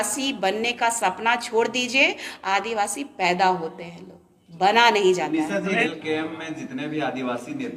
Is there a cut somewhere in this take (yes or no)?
no